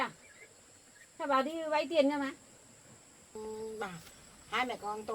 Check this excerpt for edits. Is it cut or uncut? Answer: cut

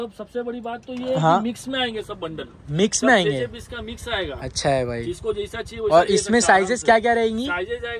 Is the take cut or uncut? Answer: uncut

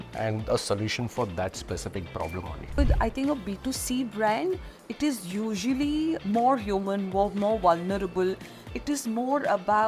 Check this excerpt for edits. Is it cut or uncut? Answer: cut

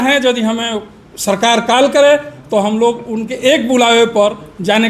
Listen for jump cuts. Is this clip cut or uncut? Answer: uncut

